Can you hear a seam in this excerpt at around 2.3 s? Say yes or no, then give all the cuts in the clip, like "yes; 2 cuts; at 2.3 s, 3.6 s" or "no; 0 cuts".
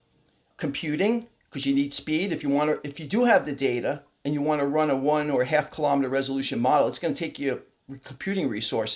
no; 0 cuts